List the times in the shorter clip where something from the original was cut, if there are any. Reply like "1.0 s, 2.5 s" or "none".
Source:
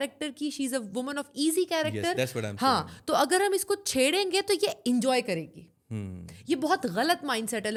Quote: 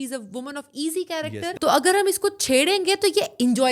1.5 s